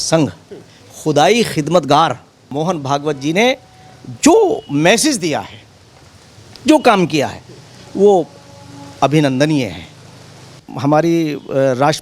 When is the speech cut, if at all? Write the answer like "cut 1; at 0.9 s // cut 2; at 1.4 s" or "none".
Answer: cut 1; at 2.5 s // cut 2; at 10.6 s